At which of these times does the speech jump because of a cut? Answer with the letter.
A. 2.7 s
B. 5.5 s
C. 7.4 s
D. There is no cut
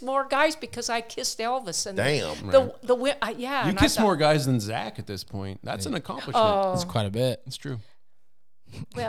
D